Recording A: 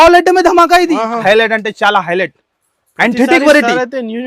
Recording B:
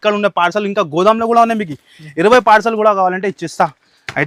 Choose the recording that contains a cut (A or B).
A